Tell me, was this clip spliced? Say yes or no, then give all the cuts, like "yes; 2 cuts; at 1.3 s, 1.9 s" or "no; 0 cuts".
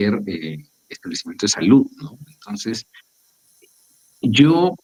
no; 0 cuts